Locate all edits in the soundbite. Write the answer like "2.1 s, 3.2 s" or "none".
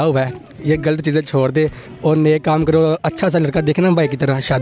1.9 s